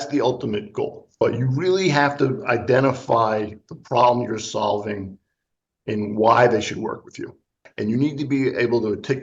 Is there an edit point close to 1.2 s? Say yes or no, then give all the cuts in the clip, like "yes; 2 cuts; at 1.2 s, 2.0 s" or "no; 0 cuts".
yes; 2 cuts; at 1.2 s, 7.7 s